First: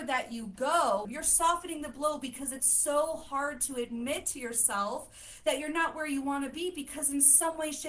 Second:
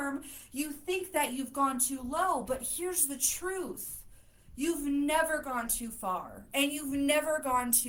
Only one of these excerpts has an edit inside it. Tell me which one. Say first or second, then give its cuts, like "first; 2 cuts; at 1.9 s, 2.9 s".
first; 1 cut; at 1.1 s